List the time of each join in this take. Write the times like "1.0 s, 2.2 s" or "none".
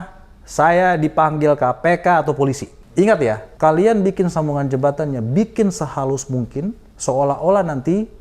2.7 s, 3.5 s, 6.9 s